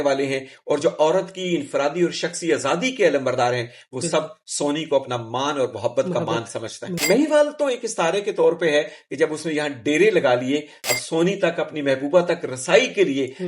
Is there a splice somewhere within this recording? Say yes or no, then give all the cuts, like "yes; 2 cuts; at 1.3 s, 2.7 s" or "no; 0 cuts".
yes; 2 cuts; at 6.9 s, 10.9 s